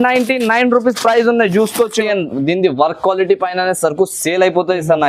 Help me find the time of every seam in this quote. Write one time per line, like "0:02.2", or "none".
0:02.0